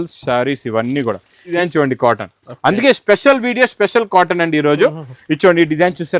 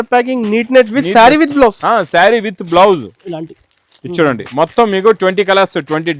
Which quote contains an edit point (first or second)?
first